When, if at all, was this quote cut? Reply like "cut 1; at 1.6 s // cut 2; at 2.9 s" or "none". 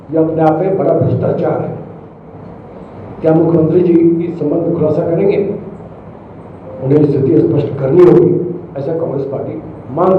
none